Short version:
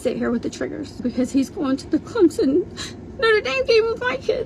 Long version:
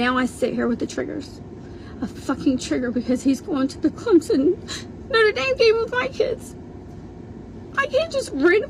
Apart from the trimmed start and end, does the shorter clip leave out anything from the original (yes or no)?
yes